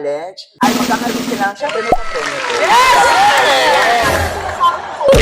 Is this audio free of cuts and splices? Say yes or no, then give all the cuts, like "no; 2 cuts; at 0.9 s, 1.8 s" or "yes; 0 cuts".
yes; 0 cuts